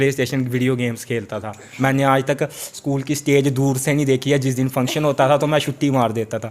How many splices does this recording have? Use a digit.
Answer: 1